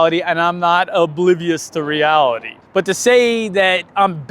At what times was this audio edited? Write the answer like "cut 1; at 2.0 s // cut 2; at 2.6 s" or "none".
cut 1; at 2.5 s